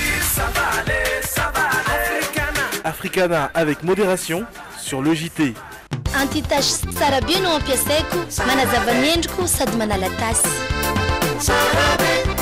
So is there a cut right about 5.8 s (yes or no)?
yes